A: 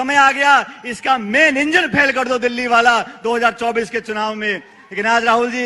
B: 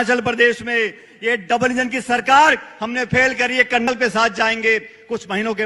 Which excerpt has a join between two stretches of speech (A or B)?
B